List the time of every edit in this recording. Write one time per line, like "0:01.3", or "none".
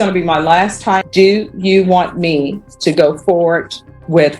0:01.1